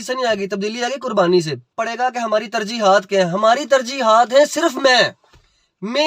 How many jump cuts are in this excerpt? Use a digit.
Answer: 1